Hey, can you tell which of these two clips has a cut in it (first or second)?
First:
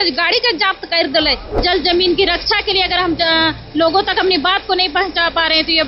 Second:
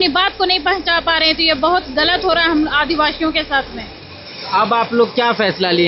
first